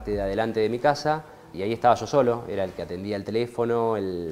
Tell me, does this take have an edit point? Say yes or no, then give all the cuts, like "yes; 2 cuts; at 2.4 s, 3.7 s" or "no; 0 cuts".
yes; 1 cut; at 1.5 s